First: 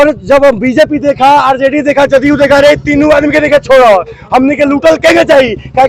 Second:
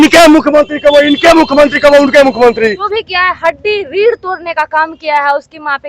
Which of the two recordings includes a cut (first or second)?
second